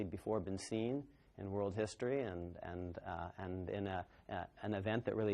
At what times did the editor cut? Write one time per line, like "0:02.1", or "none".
0:02.5